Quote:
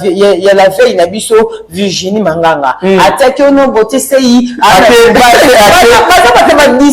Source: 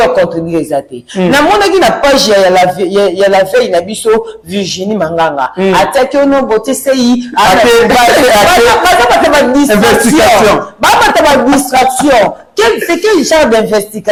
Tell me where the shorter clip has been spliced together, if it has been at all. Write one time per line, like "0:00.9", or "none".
none